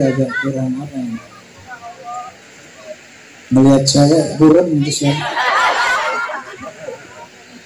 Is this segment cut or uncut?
cut